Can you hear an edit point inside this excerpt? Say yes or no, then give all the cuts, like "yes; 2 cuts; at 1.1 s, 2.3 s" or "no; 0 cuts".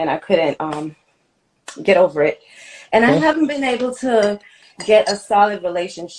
no; 0 cuts